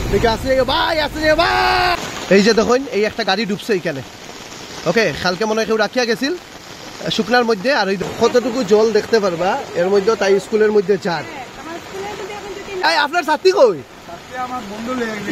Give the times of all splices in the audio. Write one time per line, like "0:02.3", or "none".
0:01.9
0:08.0
0:12.8